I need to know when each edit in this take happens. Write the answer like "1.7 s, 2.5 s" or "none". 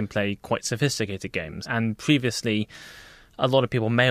1.6 s